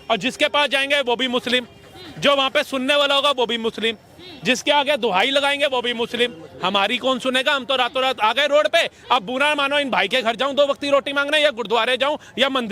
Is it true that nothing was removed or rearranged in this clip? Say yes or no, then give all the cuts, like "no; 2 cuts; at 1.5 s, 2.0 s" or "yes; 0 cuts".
yes; 0 cuts